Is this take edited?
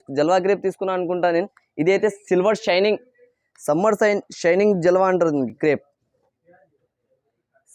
no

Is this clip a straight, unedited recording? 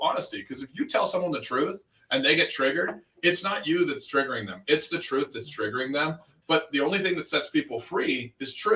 yes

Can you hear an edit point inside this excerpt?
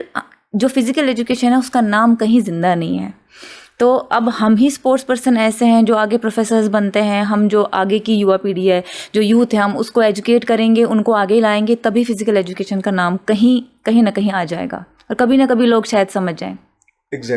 no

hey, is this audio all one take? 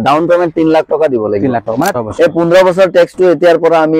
no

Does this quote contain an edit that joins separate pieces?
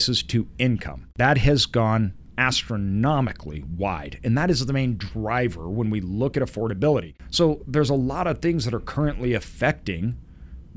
yes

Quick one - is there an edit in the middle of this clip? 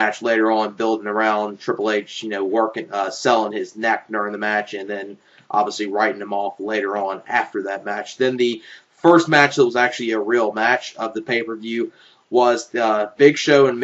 yes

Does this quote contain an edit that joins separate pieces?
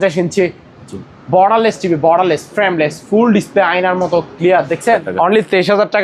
yes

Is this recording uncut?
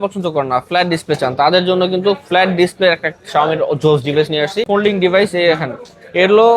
no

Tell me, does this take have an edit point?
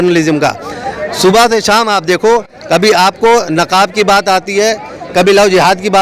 no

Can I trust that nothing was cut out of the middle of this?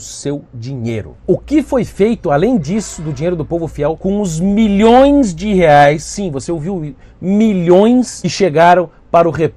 no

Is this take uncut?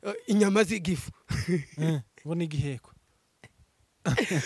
yes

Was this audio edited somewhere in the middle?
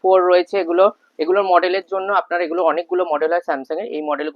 no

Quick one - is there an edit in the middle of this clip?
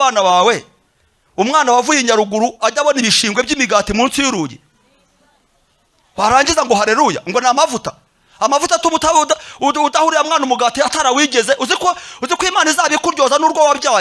no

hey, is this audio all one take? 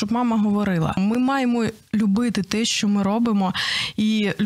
no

